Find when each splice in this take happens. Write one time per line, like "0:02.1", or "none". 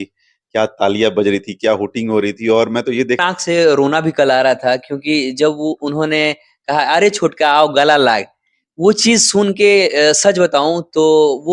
0:03.2